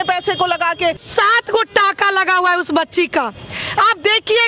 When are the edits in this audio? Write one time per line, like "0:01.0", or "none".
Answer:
0:01.0

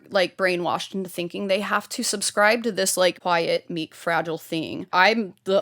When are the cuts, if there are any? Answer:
0:03.2
0:04.8

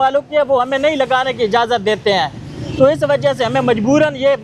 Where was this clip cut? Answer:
none

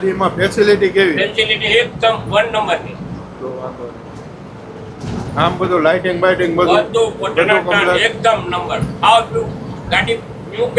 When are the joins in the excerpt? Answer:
none

